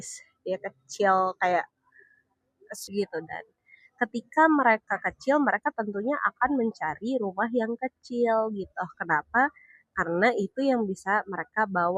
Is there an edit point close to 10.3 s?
no; 1 cut; at 2.8 s

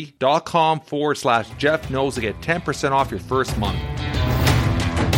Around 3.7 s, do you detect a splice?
yes; 1 cut; at 3.7 s

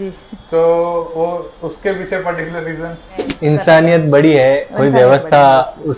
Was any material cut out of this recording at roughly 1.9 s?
no; 1 cut; at 3.2 s

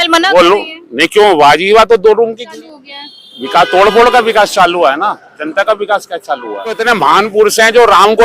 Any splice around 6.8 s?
yes; 2 cuts; at 2.5 s, 6.8 s

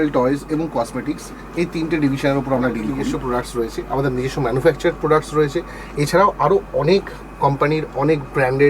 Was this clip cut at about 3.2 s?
yes; 1 cut; at 3.2 s

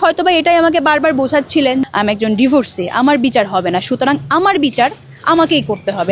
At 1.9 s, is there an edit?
yes; 1 cut; at 1.9 s

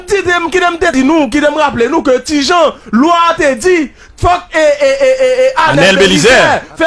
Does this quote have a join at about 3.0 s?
no; 1 cut; at 0.9 s

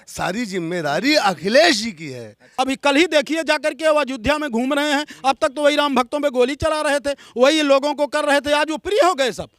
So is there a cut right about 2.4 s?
yes; 1 cut; at 2.4 s

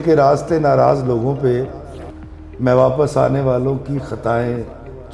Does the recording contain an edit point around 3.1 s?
no; 0 cuts

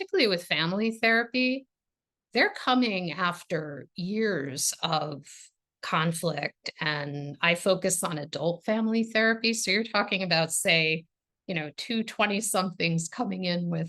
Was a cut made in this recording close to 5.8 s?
yes; 1 cut; at 5.8 s

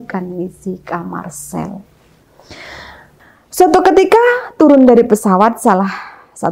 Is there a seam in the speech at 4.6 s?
no; 1 cut; at 3.3 s

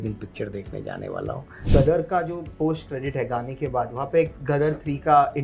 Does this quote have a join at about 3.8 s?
no; 1 cut; at 1.6 s

